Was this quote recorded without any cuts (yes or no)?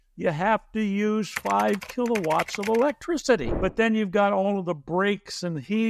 no